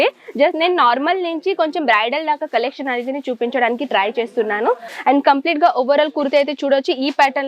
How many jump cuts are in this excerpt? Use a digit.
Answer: 1